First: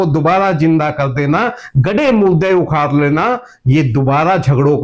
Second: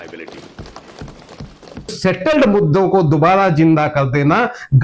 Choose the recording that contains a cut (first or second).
second